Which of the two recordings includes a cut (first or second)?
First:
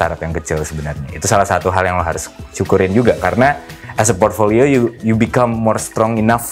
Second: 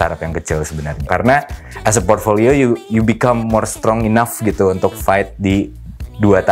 second